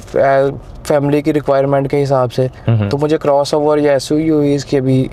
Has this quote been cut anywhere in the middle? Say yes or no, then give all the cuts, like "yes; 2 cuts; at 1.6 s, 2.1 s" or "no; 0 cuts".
no; 0 cuts